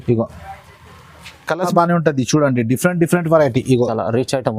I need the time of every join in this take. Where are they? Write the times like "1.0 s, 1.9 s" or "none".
1.7 s